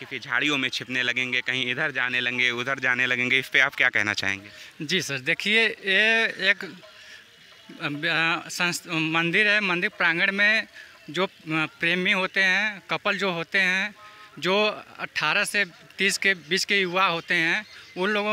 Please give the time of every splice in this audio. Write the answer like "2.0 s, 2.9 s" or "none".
none